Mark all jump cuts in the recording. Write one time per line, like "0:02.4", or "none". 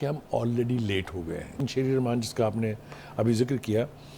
0:01.6